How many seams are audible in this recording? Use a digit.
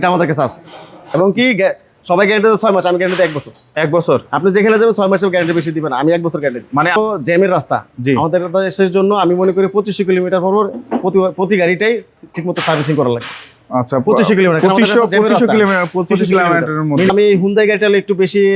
3